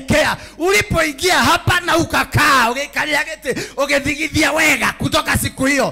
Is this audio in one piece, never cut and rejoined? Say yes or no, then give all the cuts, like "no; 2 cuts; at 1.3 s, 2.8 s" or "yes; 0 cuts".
yes; 0 cuts